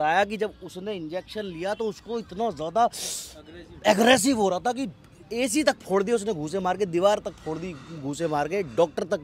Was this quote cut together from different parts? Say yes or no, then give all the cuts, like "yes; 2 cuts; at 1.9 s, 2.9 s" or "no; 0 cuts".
no; 0 cuts